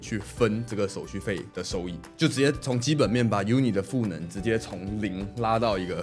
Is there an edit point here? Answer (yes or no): no